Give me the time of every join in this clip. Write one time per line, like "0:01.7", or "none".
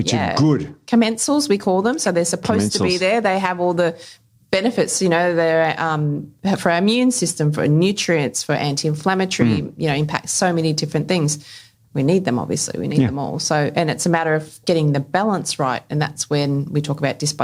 none